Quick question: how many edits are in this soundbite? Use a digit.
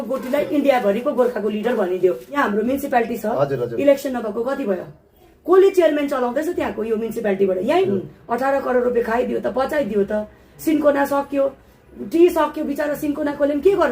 2